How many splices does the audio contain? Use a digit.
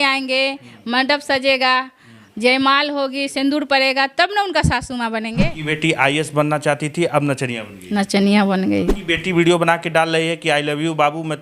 2